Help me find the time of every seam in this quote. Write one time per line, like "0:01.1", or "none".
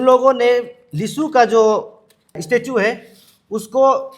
0:02.4